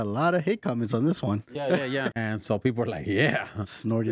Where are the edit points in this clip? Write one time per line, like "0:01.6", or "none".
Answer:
0:02.1